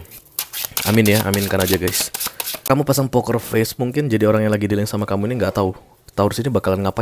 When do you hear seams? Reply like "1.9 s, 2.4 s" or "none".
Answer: 2.6 s